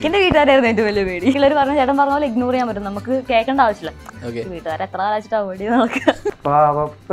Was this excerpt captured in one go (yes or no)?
no